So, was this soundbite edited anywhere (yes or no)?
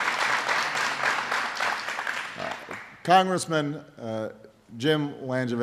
yes